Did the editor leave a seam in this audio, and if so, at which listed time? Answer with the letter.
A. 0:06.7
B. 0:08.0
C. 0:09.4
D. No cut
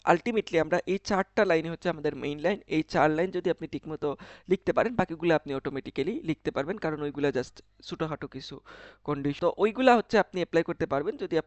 C